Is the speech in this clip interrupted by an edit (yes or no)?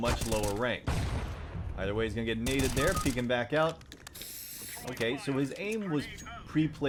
no